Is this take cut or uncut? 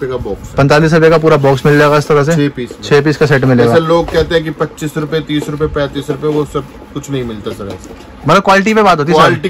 uncut